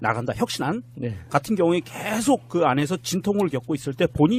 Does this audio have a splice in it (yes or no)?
no